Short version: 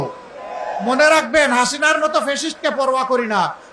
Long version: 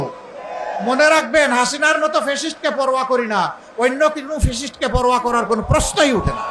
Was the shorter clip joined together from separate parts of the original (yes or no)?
no